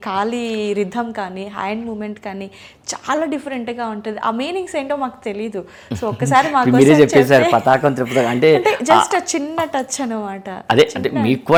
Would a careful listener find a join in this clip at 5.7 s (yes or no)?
no